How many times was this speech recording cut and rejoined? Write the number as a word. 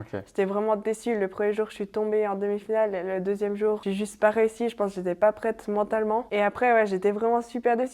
two